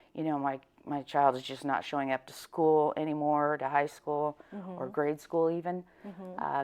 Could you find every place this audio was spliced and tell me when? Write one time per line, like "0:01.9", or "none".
none